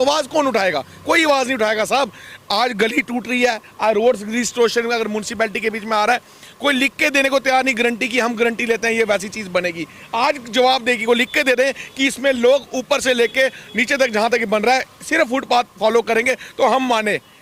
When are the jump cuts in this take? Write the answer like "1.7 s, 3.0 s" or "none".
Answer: none